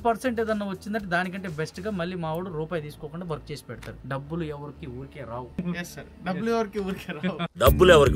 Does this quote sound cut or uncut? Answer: cut